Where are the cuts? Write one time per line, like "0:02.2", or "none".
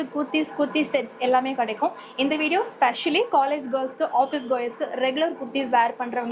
none